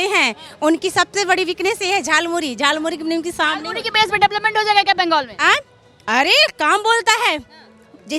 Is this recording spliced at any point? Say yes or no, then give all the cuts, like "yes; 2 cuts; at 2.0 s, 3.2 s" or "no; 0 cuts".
no; 0 cuts